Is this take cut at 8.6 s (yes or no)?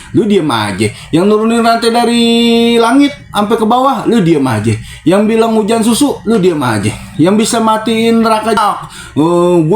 yes